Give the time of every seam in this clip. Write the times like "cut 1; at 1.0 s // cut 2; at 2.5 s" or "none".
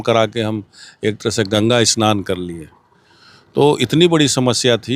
none

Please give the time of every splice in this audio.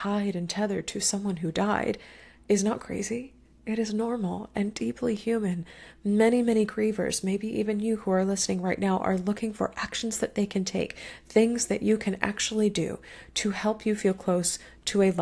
none

